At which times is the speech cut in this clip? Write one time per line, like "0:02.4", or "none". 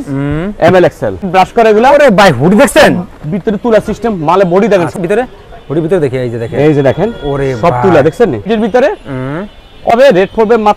0:01.2
0:04.9
0:08.5
0:09.9